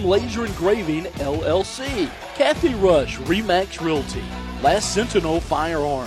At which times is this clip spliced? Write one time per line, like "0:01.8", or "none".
0:02.2